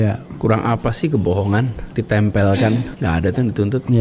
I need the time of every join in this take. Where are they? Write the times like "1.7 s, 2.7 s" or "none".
1.8 s, 2.9 s